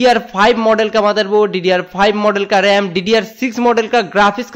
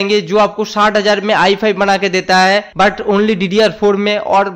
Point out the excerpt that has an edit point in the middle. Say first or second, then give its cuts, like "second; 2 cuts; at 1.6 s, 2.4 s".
second; 1 cut; at 2.7 s